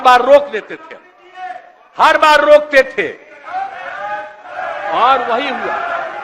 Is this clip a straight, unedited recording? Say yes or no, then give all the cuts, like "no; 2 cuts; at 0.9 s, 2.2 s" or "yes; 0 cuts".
yes; 0 cuts